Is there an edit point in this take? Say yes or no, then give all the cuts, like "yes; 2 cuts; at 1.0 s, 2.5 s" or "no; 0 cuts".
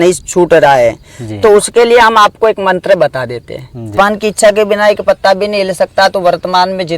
yes; 1 cut; at 3.9 s